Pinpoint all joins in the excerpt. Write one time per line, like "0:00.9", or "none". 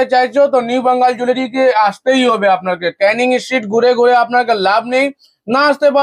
none